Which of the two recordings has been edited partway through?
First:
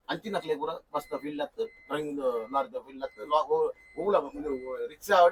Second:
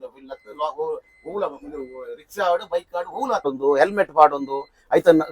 second; 1 cut; at 3.5 s

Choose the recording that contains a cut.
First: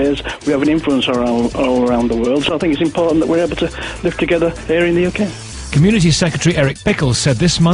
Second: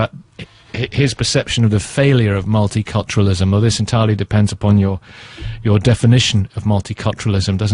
first; 1 cut; at 1.7 s

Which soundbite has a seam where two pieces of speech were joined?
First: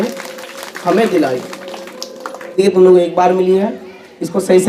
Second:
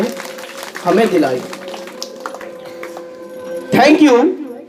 first; 1 cut; at 2.6 s

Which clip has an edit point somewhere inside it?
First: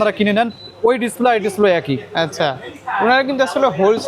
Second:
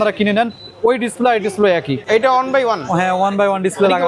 second; 1 cut; at 2.0 s

